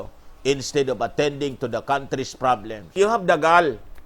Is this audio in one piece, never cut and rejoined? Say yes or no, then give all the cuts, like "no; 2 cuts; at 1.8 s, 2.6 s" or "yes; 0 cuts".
no; 1 cut; at 2.9 s